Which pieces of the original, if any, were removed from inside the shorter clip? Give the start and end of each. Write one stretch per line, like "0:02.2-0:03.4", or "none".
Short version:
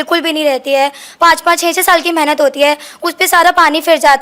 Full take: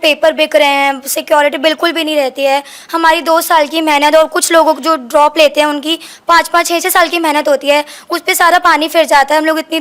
0:02.8-0:06.1